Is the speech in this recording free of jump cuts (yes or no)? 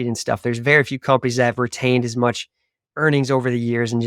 yes